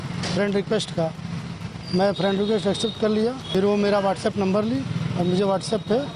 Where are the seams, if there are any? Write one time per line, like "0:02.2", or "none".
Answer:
0:03.4